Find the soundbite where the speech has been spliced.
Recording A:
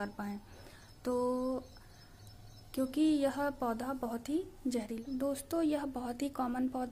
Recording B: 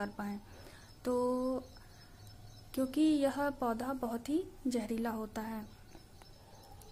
A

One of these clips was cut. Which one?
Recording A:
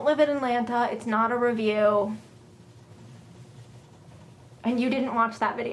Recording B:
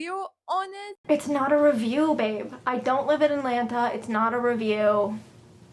B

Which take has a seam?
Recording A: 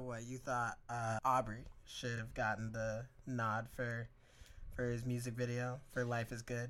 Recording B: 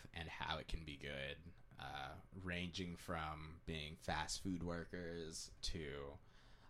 A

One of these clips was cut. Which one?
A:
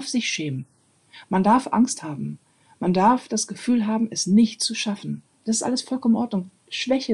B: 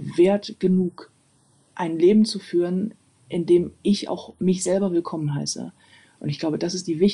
A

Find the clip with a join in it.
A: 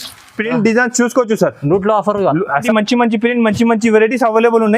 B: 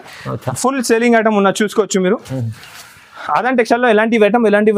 A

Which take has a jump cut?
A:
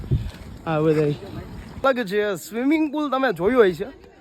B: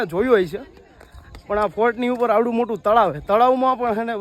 A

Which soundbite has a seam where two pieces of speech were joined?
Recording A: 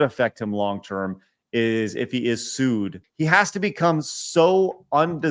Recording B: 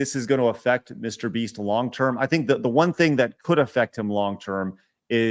A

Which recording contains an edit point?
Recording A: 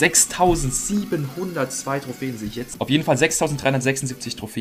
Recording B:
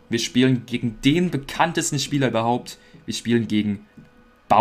A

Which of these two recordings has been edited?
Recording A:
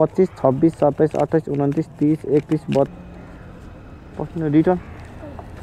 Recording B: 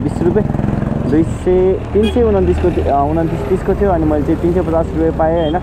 A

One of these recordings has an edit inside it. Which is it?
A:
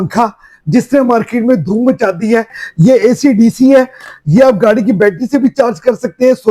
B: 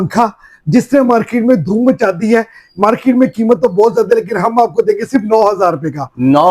A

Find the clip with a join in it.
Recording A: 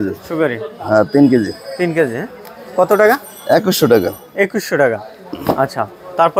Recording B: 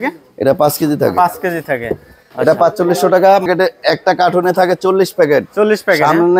B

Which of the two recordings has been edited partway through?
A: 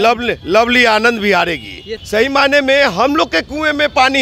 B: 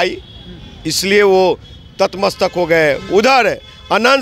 A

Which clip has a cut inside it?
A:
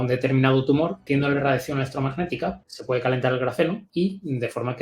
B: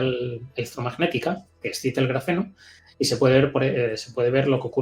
A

